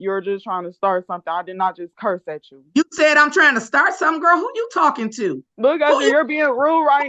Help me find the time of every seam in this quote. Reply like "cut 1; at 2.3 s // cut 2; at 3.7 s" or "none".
cut 1; at 5.5 s